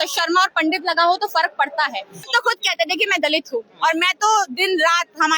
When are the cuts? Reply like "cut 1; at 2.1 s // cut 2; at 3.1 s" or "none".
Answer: cut 1; at 2.3 s